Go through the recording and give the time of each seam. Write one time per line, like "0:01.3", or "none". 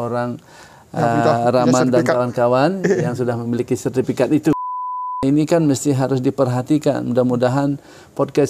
0:05.2